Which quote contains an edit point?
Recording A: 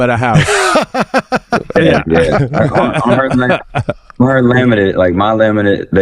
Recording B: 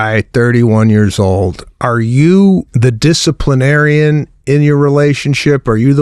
B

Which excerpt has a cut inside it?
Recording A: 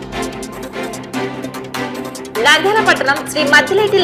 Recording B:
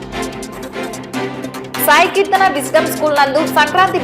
B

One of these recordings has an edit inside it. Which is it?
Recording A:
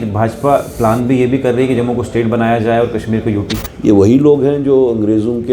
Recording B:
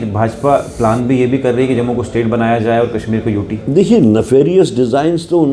A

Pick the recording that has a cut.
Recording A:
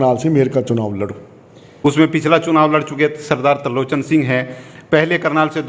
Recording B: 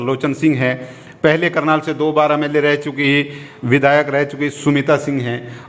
A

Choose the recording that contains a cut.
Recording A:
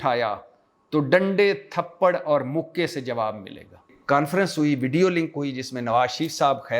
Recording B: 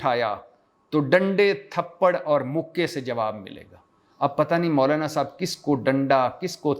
A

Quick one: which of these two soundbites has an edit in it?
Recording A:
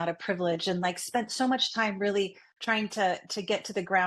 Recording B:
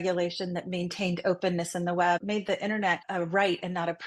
B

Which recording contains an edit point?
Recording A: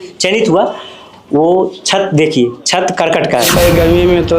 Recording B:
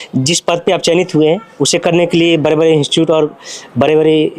A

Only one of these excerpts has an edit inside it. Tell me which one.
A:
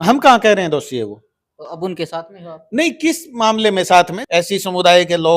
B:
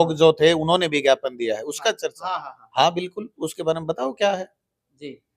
A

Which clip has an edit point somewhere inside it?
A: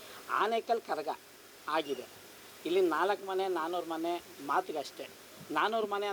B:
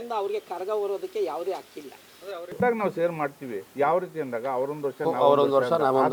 B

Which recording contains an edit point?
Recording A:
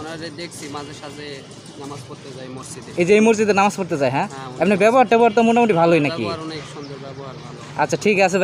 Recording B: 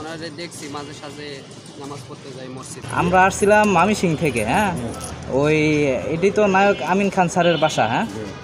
B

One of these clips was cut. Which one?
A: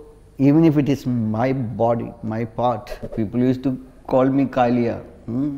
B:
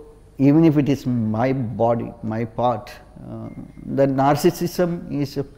A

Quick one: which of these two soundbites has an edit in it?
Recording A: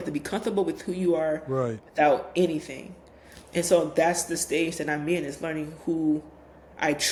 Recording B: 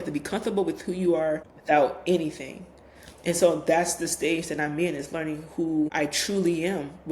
B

